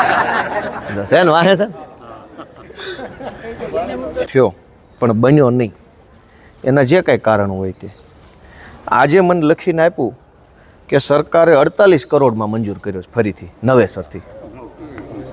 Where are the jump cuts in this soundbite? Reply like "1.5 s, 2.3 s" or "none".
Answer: 4.3 s